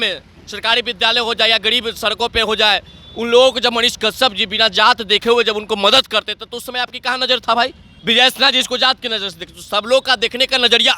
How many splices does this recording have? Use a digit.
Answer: 1